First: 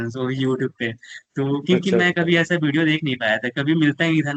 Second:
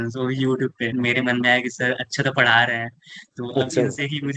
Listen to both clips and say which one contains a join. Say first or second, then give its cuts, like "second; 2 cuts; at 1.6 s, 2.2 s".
second; 1 cut; at 0.9 s